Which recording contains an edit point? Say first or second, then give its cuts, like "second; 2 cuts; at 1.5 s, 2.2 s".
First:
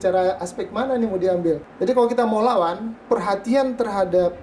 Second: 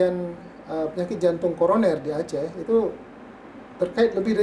first; 2 cuts; at 1.7 s, 2.9 s